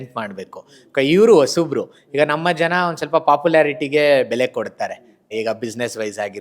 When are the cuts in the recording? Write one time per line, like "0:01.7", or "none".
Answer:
0:05.3